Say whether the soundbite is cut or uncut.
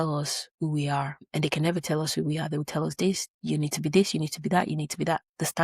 cut